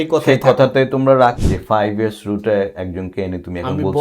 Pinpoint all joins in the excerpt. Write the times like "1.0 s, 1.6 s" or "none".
1.4 s